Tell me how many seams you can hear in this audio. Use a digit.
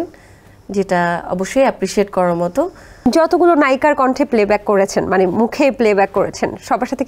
1